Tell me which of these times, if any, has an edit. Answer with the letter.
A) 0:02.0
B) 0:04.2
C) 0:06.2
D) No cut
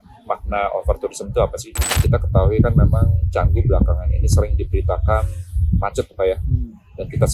A